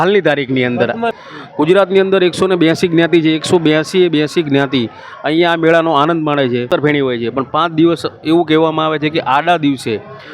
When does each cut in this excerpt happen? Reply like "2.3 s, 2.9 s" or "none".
1.2 s, 6.7 s